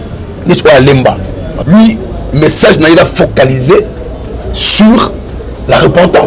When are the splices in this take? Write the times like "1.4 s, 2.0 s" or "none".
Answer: 1.5 s